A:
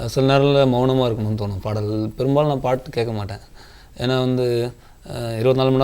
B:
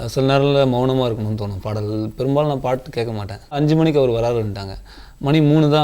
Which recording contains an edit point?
B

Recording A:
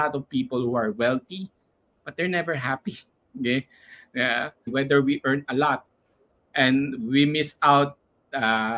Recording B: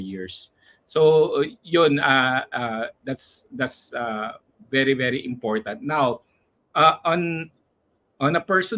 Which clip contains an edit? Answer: A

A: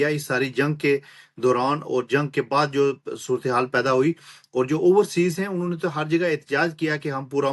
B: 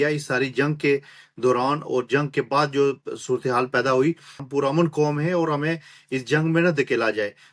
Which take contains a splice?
B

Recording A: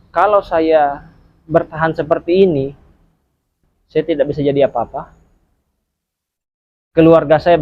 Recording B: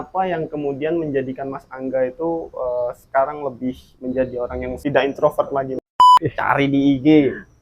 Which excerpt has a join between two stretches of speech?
B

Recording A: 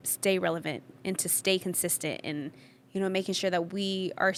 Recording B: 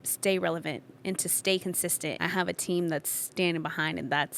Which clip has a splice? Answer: B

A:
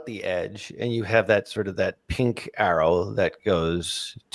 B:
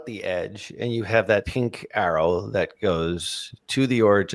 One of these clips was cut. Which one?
B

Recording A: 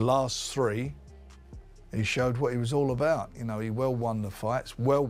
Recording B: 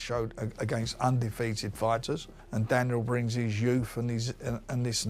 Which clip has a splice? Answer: B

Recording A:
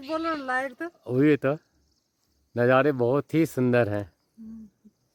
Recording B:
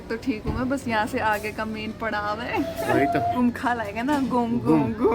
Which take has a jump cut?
B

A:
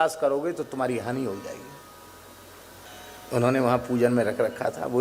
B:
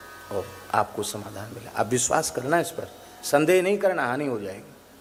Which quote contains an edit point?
A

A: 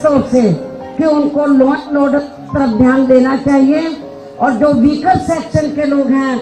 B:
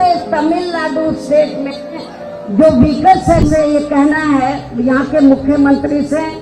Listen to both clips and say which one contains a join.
B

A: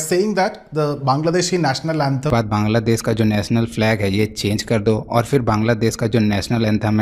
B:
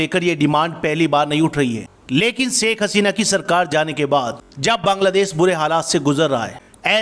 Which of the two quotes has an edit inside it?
A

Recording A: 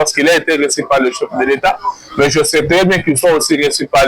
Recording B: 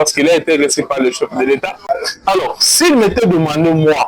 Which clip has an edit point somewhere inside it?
B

